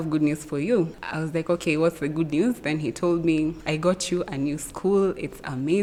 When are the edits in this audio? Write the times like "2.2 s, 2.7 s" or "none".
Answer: none